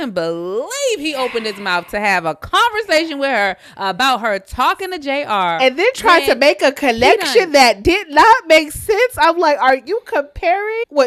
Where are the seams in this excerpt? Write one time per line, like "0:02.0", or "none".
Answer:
none